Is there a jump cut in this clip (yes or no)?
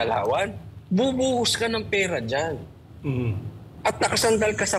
no